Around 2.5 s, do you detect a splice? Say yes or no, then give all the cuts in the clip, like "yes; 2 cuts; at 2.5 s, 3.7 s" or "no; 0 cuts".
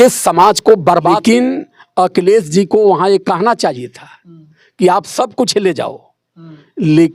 no; 1 cut; at 1.2 s